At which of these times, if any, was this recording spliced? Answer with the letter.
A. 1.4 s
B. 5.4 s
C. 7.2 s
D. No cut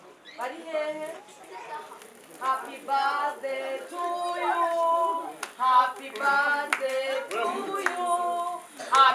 A